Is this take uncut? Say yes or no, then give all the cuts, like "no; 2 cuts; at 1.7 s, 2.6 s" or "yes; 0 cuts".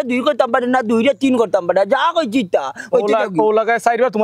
yes; 0 cuts